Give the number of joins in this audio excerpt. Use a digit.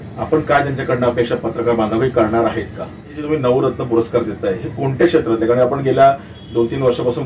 1